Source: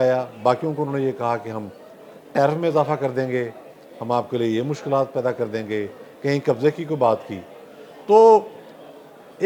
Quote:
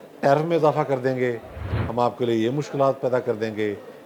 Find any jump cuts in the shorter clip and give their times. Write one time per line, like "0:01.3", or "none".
none